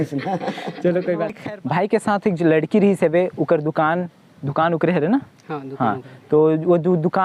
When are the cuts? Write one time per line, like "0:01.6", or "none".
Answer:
0:01.4